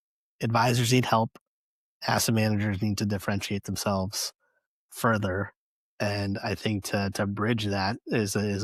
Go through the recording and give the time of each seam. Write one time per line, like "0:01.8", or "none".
none